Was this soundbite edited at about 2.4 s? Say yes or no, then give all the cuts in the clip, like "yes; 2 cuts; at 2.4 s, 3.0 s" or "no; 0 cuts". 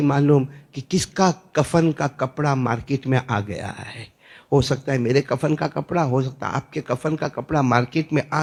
no; 0 cuts